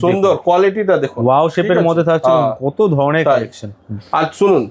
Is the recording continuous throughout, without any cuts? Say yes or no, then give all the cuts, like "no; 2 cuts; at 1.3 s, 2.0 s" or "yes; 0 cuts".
yes; 0 cuts